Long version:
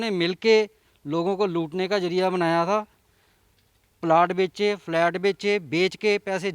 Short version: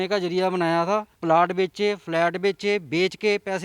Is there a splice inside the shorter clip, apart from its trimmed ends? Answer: yes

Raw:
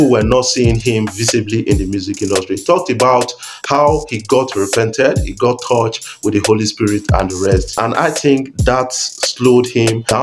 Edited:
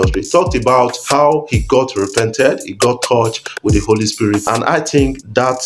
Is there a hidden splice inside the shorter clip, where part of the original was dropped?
yes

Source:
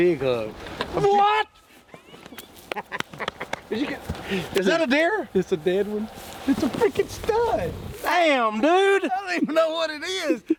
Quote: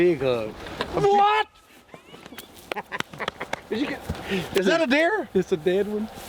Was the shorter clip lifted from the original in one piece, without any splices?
yes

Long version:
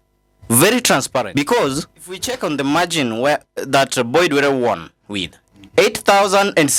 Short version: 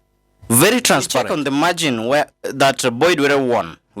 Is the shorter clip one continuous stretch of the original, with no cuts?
no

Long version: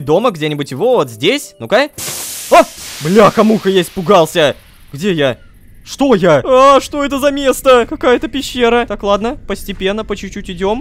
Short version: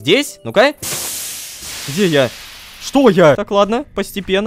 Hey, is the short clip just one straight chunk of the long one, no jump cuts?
no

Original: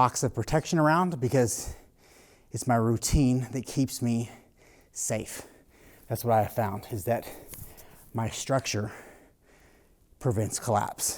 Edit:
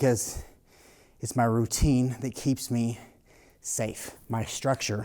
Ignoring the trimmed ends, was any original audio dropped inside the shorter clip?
yes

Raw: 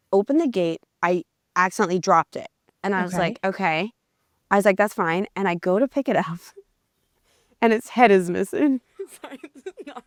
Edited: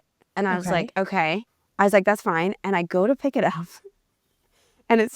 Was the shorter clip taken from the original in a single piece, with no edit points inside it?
no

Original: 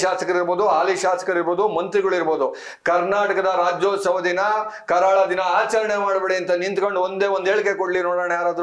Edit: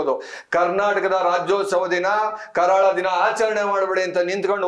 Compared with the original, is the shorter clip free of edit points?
yes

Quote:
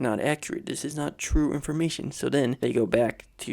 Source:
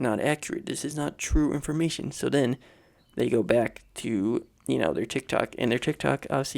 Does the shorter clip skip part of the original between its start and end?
yes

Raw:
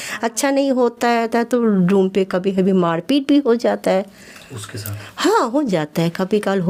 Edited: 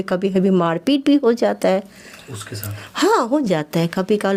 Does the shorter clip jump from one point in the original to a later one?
no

